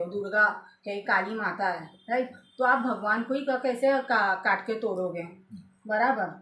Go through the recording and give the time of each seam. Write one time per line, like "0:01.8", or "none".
none

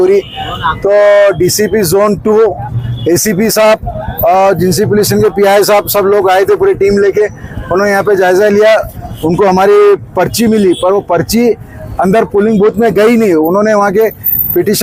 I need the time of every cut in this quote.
none

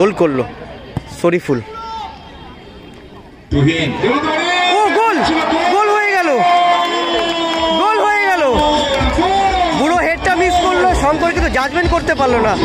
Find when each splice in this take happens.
none

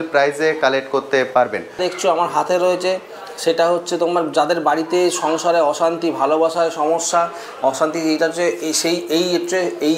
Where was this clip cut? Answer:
0:01.8

